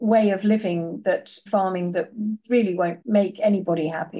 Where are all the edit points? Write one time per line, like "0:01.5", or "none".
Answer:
0:01.4
0:03.0